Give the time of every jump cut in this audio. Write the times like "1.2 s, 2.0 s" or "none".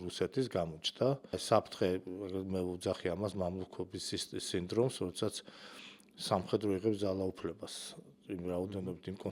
1.3 s